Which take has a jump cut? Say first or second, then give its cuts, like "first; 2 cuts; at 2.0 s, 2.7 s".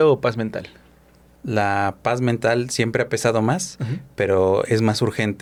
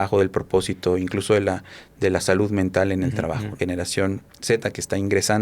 second; 1 cut; at 3.5 s